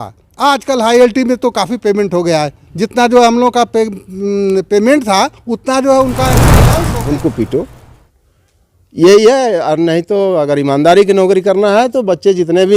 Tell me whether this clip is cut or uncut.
cut